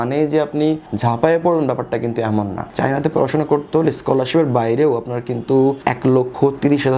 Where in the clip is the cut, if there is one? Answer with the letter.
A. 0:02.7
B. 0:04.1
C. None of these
A